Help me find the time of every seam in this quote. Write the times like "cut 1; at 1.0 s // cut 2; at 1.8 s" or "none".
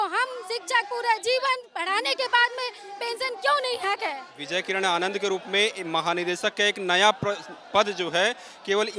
cut 1; at 4.3 s